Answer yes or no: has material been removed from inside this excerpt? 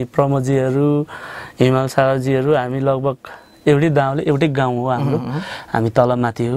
no